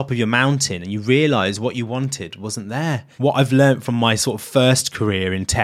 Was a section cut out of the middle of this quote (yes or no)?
yes